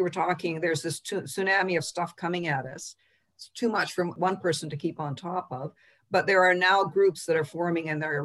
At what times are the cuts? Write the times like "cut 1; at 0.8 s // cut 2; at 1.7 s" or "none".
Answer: cut 1; at 4.1 s